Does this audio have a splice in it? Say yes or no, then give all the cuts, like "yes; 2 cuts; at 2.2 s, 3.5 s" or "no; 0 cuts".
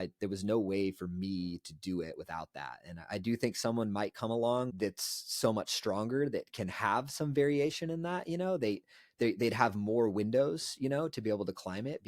yes; 1 cut; at 4.7 s